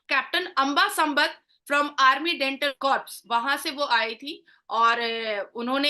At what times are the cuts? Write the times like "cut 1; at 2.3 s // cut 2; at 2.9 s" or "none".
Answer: cut 1; at 2.8 s